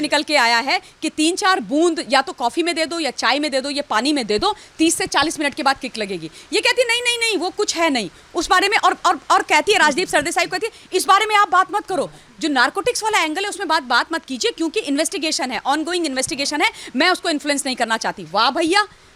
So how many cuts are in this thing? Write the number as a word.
zero